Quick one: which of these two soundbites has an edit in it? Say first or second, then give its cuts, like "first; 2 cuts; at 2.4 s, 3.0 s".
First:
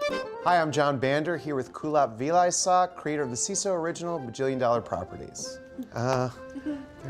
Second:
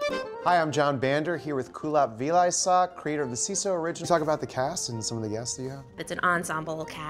first; 1 cut; at 4.0 s